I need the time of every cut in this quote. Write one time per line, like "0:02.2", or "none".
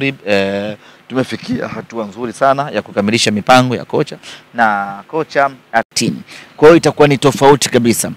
0:05.9